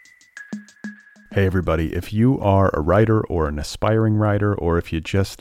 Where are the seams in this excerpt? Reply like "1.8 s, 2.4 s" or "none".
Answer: 1.0 s